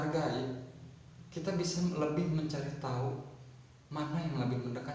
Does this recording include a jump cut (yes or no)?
no